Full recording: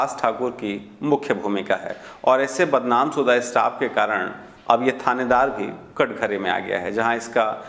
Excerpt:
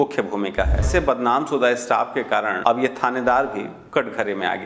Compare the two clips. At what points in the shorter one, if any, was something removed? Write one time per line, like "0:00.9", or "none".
0:00.9
0:02.5